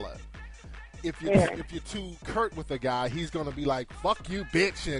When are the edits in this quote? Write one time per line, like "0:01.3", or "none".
0:02.8